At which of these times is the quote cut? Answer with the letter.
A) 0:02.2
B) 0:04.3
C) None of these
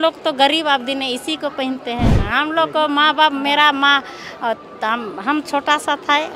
A